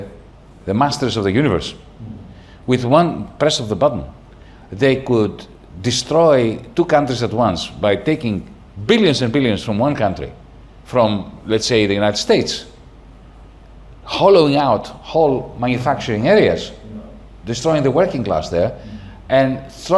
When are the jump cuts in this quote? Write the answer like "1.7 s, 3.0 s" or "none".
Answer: none